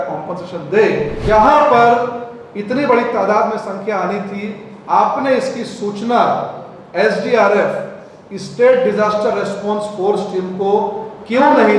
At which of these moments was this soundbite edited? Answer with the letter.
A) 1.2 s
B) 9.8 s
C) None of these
A